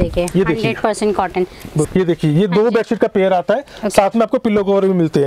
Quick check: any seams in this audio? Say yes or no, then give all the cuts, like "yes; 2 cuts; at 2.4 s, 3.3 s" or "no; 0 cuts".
yes; 1 cut; at 1.9 s